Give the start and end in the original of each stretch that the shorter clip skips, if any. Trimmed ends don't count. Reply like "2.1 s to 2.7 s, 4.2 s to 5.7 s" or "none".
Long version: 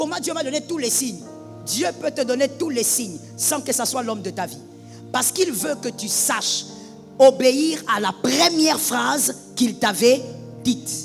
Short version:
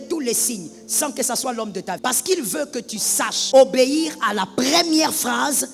4.5 s to 5.1 s, 6.5 s to 7.0 s